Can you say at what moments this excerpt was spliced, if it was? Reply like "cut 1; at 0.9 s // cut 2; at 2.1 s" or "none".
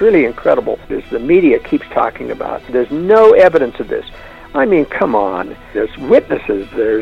cut 1; at 1.0 s // cut 2; at 2.7 s // cut 3; at 5.7 s